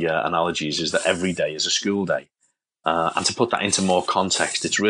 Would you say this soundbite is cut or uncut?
uncut